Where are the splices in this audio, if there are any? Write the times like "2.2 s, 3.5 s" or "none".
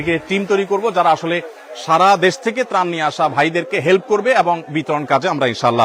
none